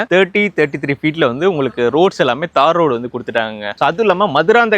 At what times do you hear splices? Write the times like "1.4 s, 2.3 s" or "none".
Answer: 3.8 s